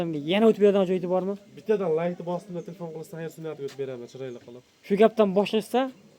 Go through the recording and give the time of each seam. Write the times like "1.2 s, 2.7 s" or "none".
none